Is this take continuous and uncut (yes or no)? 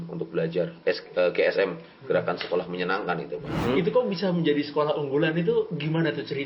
no